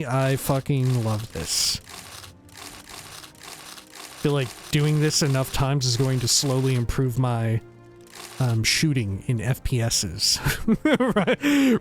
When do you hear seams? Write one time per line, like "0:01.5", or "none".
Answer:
0:04.2